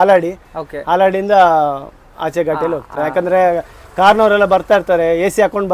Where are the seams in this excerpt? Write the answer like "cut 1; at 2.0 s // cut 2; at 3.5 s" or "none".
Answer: cut 1; at 2.9 s